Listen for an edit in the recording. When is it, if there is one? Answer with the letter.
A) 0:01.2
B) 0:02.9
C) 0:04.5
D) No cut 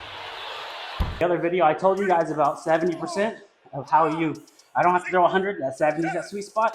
A